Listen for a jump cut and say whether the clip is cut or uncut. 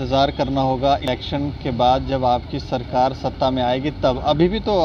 cut